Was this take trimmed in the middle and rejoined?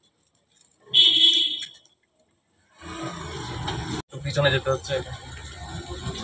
no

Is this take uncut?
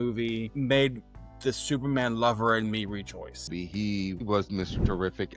no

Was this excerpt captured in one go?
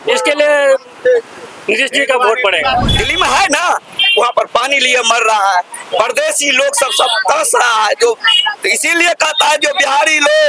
no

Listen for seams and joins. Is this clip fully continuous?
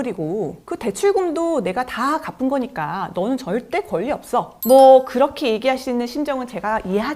no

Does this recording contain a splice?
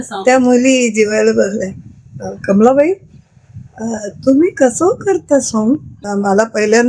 yes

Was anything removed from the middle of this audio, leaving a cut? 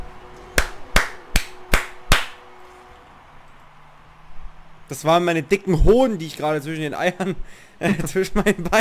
no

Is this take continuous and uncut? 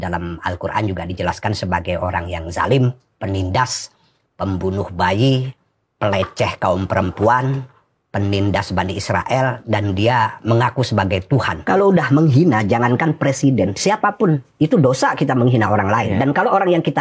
no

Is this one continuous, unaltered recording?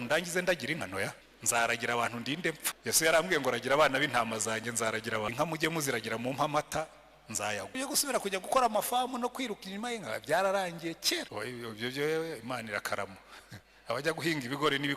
no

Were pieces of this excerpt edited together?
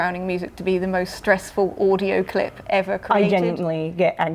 no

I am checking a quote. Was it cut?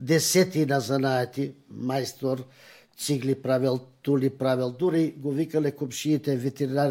no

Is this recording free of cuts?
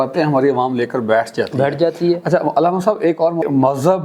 yes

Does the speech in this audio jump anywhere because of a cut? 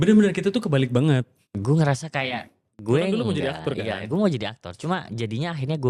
yes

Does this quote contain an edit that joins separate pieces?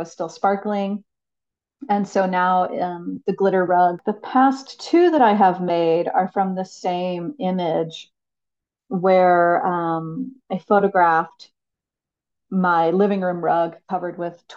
yes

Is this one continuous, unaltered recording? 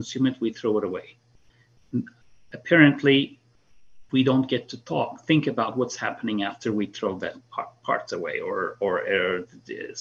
yes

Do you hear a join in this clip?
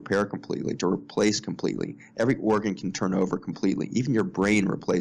no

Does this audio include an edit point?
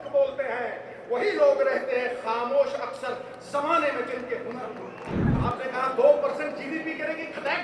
yes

